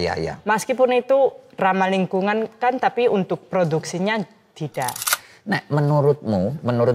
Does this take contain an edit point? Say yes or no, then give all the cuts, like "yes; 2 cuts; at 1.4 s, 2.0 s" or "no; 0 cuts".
yes; 1 cut; at 5.0 s